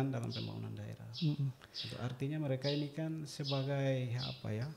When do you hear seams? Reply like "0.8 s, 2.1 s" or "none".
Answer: none